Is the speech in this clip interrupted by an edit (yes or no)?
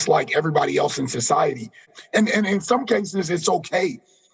yes